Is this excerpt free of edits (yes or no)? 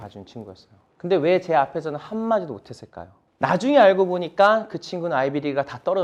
yes